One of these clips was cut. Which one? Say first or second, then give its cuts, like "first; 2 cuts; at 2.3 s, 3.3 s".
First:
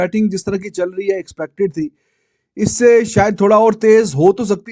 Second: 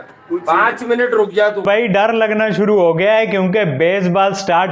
second; 1 cut; at 1.7 s